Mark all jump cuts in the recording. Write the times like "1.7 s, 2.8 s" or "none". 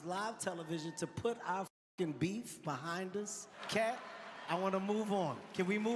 3.4 s

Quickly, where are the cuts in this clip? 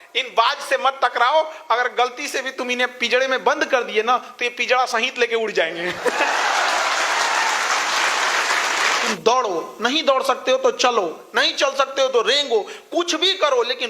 9.1 s

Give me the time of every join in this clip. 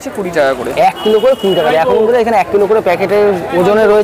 none

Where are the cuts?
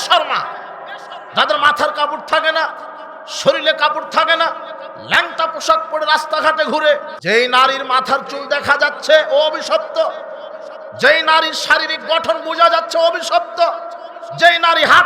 7.1 s

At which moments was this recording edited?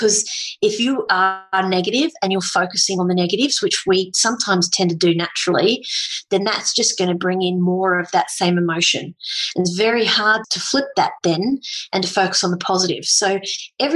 10.5 s

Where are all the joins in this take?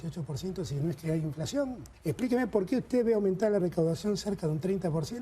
1.9 s

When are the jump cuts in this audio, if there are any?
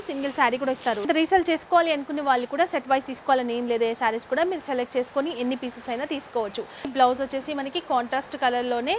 1.1 s, 6.8 s

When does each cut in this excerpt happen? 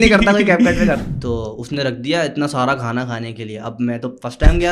1.0 s

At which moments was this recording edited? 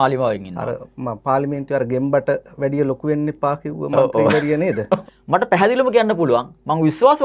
5.1 s

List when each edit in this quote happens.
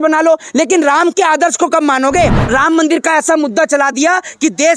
2.4 s

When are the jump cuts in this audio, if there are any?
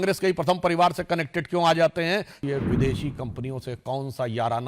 2.4 s

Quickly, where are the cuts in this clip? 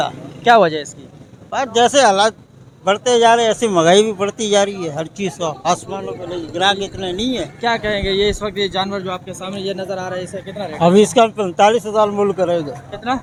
none

